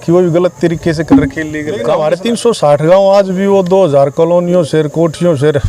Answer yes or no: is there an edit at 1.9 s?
yes